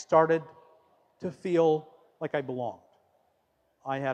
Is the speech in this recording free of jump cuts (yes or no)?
yes